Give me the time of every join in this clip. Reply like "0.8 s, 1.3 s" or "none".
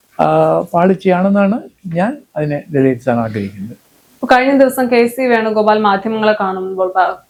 none

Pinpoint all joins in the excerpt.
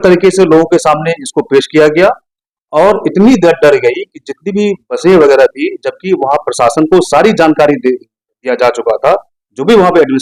none

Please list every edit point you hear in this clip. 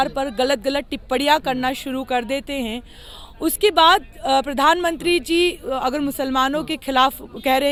none

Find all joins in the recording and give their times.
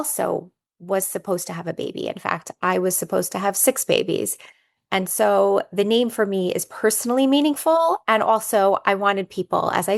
none

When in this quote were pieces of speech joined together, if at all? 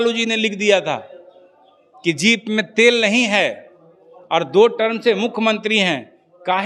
none

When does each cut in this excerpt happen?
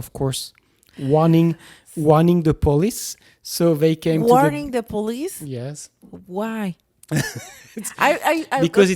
none

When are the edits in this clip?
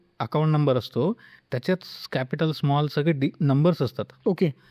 none

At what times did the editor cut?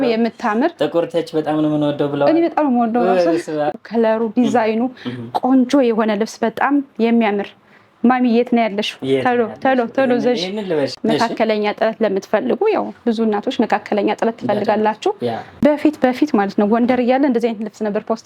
3.7 s, 10.9 s, 15.6 s

